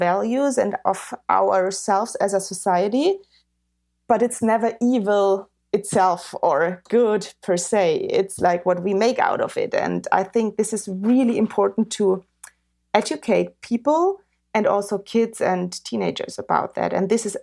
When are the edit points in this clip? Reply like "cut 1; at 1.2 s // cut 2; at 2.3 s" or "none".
none